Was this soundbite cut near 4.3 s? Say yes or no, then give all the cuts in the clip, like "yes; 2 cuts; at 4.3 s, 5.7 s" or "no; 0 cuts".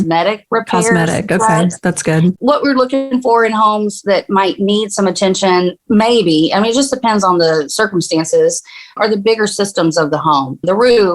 no; 1 cut; at 2.3 s